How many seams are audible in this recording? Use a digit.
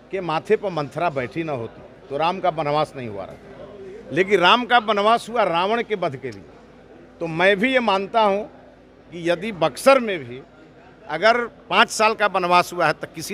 0